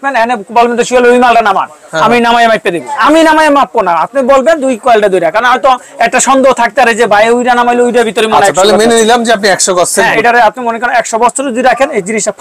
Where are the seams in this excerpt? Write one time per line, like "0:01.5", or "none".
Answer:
0:02.9
0:10.2